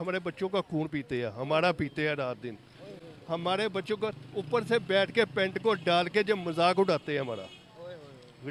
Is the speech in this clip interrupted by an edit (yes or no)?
no